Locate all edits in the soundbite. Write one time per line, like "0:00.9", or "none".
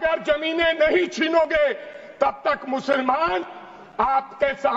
none